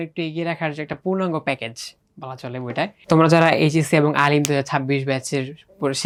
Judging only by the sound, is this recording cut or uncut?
uncut